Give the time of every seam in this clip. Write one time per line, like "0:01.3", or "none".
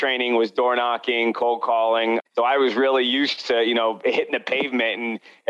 0:02.2